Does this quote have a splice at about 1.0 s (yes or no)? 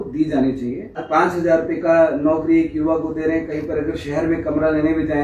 yes